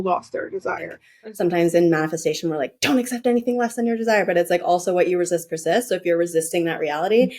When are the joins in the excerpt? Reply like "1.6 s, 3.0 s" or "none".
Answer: 1.1 s